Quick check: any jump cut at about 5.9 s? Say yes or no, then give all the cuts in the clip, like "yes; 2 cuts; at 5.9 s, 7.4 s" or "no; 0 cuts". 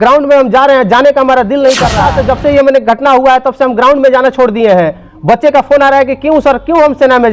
no; 1 cut; at 2.0 s